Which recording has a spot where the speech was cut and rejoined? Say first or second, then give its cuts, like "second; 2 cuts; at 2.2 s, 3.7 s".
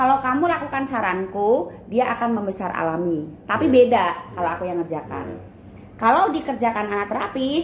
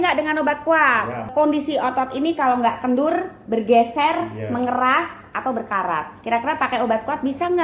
second; 1 cut; at 1.3 s